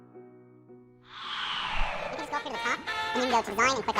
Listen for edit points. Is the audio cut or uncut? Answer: cut